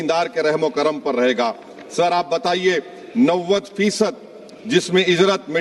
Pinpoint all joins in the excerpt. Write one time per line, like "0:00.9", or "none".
none